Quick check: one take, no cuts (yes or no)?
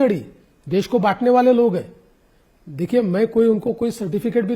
yes